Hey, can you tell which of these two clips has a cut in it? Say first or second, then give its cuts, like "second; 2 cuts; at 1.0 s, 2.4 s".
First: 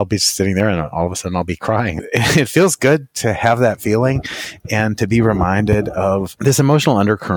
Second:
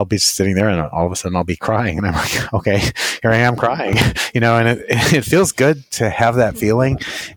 first; 2 cuts; at 2.0 s, 6.3 s